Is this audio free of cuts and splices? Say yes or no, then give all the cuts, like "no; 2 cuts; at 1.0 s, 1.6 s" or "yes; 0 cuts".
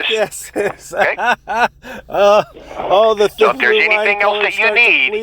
yes; 0 cuts